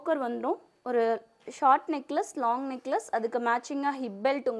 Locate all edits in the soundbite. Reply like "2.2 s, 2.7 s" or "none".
none